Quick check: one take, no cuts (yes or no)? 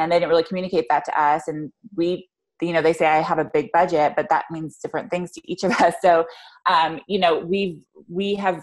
yes